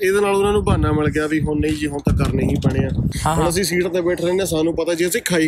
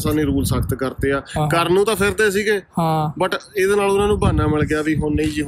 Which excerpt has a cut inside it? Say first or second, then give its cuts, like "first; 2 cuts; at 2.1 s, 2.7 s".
first; 1 cut; at 3.1 s